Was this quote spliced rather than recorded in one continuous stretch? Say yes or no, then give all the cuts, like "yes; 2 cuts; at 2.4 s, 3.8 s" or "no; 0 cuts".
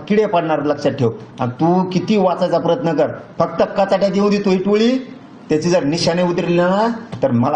no; 0 cuts